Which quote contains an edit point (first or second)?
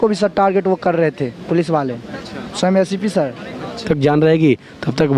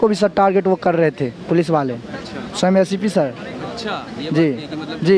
first